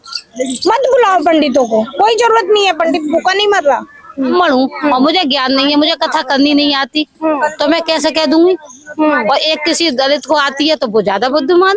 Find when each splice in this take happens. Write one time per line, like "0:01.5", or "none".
0:04.3